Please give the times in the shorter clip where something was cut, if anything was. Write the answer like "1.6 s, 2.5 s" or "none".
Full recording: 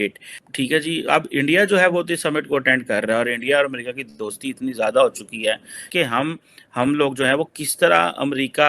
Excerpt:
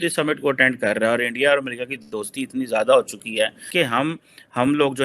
3.6 s